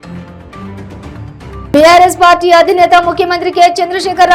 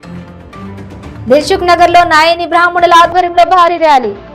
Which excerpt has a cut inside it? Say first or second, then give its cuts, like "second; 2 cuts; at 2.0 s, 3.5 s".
second; 1 cut; at 1.1 s